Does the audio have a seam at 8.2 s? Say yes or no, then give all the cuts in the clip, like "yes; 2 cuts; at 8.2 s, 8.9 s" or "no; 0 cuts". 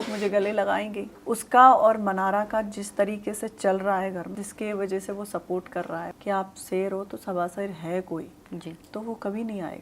no; 3 cuts; at 1.1 s, 4.3 s, 6.1 s